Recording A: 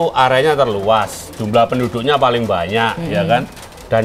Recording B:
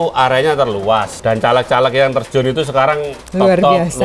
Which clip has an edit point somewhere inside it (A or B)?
B